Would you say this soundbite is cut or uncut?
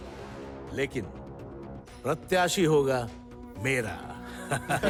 uncut